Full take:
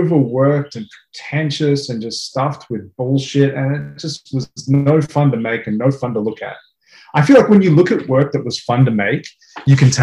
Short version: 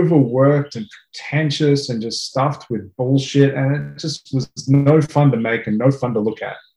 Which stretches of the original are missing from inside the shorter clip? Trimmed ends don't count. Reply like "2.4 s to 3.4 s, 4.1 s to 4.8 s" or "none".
none